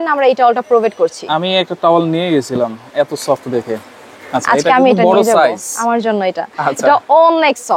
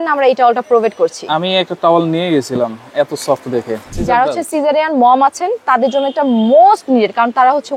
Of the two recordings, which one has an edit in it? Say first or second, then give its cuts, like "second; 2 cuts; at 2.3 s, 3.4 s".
second; 1 cut; at 3.9 s